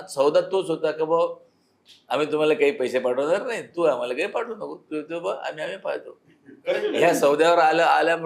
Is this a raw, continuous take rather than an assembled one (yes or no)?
yes